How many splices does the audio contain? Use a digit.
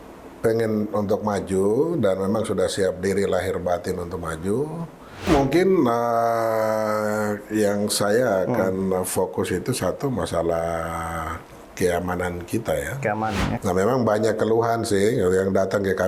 2